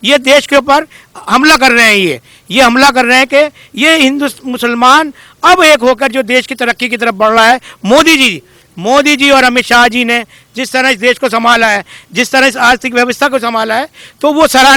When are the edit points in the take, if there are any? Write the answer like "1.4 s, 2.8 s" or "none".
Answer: none